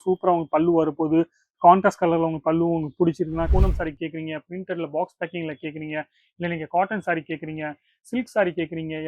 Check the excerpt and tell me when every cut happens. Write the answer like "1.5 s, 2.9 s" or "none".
3.5 s